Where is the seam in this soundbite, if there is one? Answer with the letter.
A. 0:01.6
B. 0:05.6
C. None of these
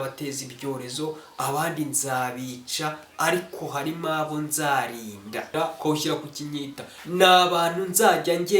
B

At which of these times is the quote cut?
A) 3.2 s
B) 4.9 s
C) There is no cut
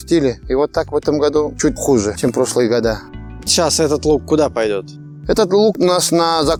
C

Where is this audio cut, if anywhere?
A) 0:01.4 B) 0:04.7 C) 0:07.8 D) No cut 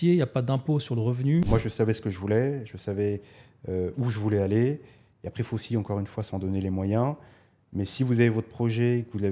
A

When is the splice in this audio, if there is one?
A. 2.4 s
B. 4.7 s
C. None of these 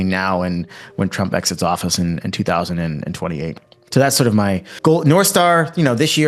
B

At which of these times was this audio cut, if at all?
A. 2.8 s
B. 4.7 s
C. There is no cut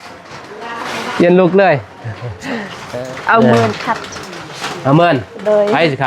A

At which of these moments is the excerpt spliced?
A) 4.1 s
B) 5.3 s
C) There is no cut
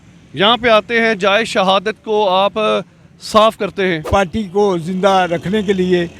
A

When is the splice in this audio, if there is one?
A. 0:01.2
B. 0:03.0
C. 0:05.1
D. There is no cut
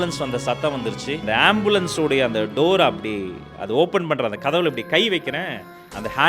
A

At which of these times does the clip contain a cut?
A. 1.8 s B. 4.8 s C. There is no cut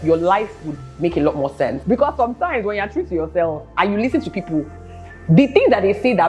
A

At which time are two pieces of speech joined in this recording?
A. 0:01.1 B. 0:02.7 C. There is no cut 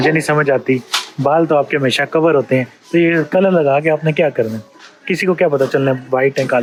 C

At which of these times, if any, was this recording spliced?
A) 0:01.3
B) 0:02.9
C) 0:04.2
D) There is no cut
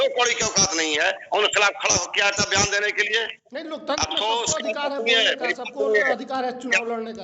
D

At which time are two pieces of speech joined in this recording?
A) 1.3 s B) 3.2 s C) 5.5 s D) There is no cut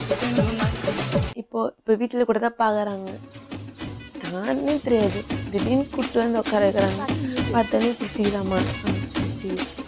A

